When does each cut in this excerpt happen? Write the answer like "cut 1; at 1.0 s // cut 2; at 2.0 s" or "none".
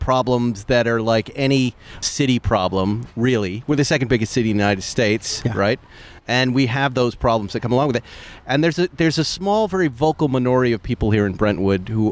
none